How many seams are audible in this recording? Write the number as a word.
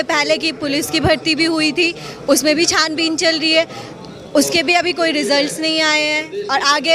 zero